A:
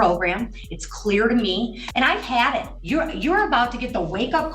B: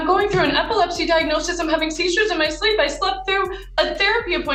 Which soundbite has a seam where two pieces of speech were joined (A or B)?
A